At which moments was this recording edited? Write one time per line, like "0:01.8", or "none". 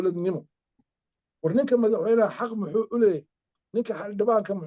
none